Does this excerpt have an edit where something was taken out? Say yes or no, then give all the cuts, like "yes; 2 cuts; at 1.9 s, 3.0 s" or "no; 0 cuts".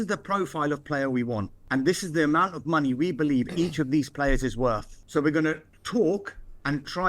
yes; 3 cuts; at 1.6 s, 4.9 s, 5.7 s